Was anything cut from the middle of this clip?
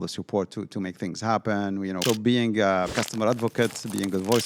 yes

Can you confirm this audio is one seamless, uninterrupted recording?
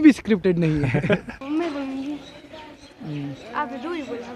no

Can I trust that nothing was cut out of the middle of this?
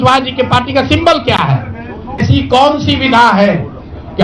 no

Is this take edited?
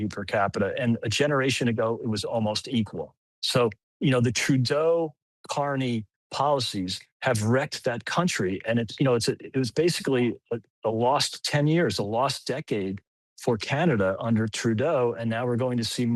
no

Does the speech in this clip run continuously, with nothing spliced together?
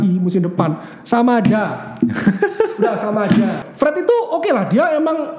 no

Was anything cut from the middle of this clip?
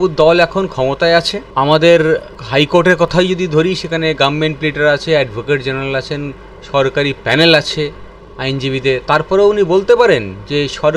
yes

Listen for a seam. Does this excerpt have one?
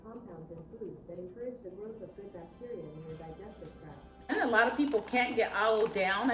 yes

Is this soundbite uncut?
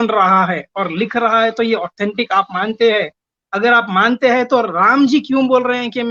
yes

